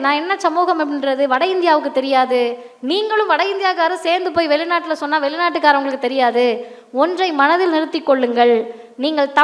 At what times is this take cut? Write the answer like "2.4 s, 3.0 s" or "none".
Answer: none